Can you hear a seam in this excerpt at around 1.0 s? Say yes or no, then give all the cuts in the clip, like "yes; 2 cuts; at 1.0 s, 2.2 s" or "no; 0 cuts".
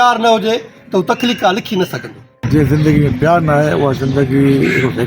no; 1 cut; at 2.4 s